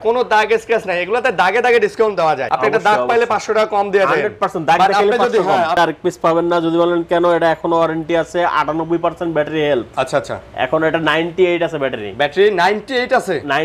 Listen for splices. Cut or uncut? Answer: cut